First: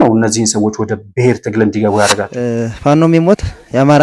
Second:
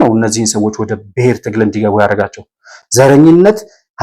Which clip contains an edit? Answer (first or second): first